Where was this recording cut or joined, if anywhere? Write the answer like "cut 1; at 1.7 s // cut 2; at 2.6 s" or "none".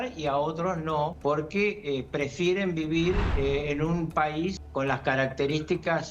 cut 1; at 1.2 s // cut 2; at 3.3 s // cut 3; at 4.6 s